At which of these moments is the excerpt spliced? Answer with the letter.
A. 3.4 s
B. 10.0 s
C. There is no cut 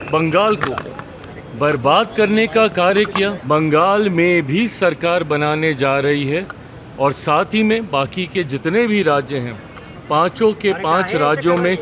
A